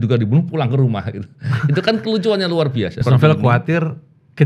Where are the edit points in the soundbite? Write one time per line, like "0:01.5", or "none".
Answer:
0:03.0